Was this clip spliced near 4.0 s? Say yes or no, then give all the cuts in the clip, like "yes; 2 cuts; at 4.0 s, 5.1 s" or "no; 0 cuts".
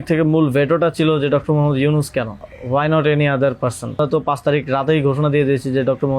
yes; 1 cut; at 4.0 s